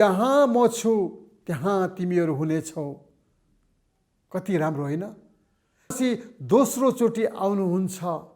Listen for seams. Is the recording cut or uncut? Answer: cut